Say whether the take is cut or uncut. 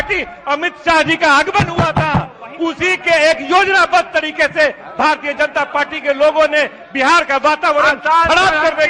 uncut